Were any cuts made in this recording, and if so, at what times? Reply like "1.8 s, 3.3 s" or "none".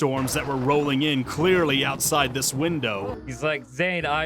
3.2 s